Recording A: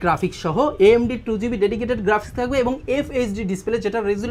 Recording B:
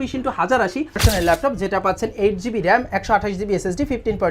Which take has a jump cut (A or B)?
B